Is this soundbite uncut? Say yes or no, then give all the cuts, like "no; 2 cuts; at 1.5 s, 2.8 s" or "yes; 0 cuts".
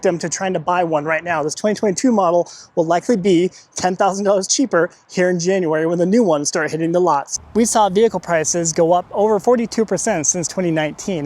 no; 1 cut; at 7.3 s